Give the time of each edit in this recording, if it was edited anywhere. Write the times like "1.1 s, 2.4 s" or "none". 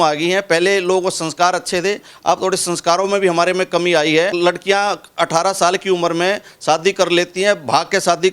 4.3 s